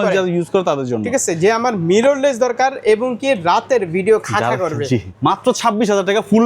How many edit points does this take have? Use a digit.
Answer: 1